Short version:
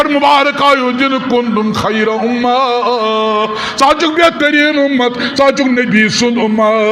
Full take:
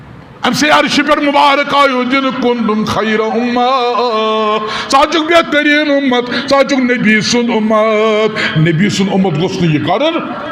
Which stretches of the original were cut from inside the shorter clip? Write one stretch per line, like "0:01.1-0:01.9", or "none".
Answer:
none